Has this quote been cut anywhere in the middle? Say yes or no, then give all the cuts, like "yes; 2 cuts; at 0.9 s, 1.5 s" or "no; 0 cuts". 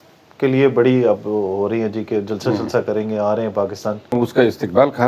yes; 1 cut; at 4.1 s